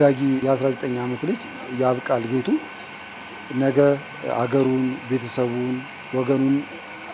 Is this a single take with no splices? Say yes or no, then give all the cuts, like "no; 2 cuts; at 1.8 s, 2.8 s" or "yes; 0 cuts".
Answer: yes; 0 cuts